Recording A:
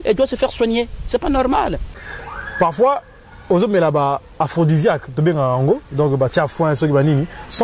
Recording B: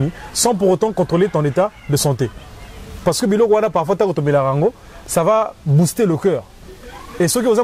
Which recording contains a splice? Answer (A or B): A